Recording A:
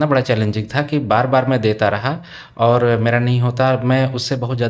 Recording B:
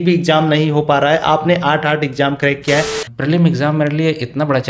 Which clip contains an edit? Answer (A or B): B